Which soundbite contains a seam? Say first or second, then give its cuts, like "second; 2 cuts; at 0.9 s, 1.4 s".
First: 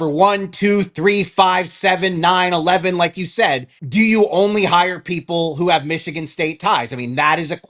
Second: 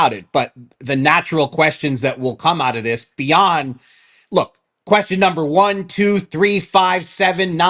first; 1 cut; at 3.7 s